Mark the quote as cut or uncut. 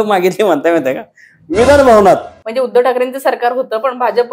cut